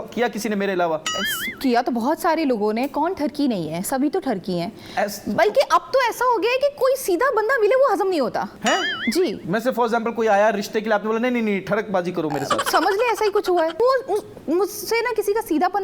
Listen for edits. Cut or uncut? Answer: cut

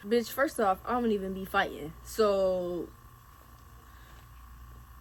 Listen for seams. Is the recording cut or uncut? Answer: uncut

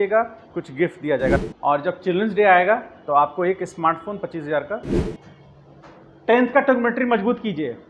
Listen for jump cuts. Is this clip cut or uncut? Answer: cut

